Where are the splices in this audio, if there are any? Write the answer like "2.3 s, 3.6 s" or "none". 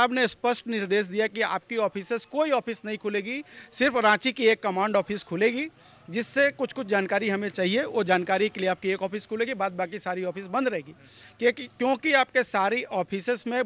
none